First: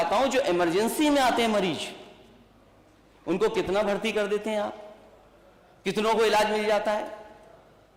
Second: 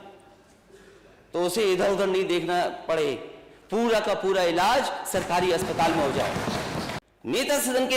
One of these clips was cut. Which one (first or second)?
second